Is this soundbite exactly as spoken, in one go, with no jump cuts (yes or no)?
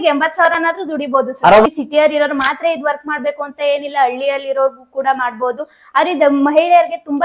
no